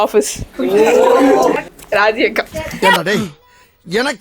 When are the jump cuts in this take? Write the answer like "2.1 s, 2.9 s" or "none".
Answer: 1.7 s